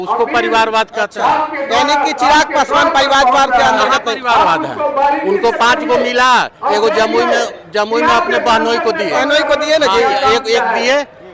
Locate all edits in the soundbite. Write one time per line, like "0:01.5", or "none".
none